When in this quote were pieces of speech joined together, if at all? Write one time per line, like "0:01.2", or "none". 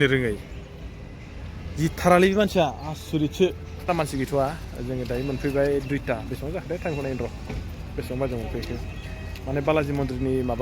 0:03.9